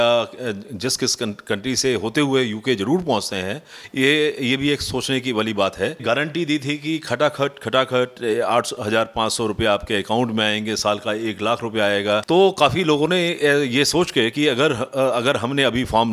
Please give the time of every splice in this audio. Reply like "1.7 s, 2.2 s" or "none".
6.0 s, 12.2 s